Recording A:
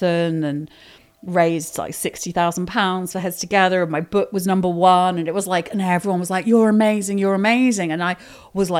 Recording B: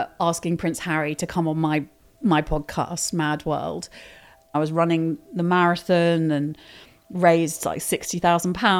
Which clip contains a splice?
B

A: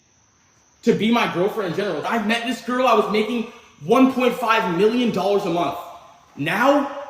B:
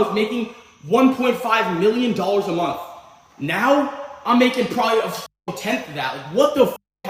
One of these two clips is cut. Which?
A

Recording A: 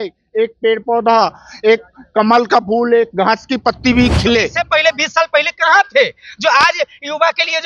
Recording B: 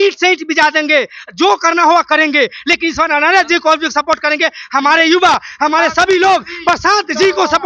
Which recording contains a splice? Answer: A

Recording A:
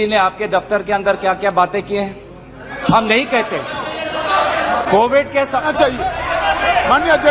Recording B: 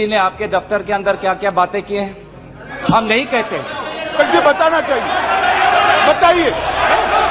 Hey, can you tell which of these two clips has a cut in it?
B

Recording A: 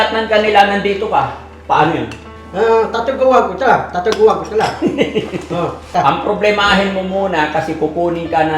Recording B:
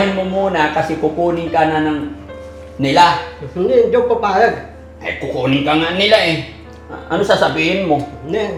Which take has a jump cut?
A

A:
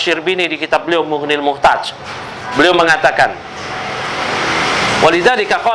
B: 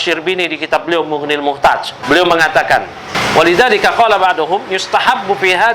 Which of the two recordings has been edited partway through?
B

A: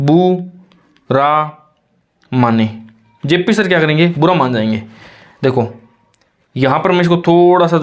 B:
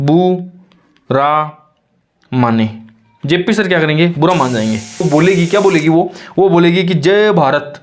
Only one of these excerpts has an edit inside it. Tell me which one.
B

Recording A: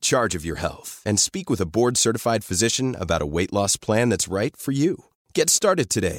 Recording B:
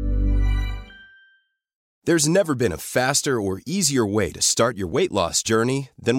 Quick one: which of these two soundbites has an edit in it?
B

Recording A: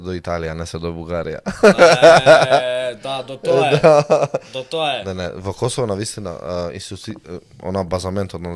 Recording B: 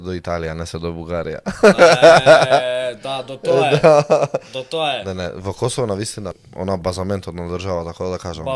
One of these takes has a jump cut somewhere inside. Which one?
B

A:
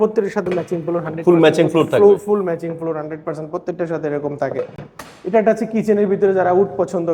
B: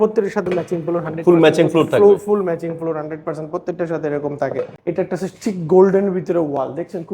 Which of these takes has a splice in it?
B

